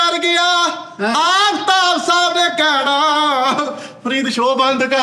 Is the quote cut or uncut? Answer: uncut